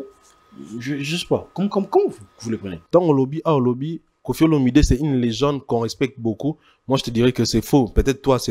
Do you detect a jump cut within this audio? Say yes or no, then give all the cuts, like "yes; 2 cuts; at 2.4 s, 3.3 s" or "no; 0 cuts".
yes; 1 cut; at 2.7 s